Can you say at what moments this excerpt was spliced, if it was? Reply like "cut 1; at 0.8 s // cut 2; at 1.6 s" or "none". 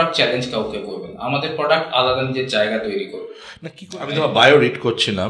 cut 1; at 3.6 s